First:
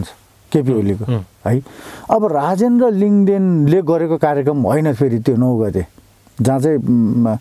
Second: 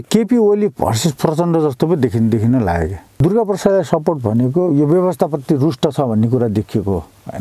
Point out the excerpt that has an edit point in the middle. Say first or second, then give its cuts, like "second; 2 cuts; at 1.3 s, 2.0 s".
second; 1 cut; at 3.0 s